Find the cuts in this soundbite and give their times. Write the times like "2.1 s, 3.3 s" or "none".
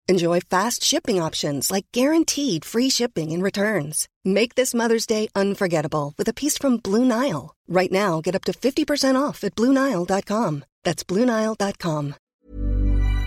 12.3 s